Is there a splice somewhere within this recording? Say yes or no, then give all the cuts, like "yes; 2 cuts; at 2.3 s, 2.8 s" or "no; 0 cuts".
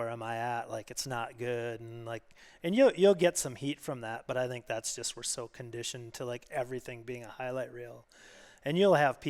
no; 0 cuts